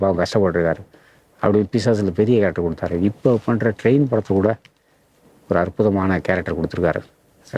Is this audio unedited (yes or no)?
yes